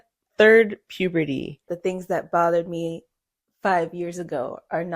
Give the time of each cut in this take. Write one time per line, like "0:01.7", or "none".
0:01.7